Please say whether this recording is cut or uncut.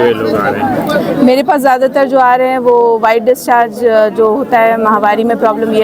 uncut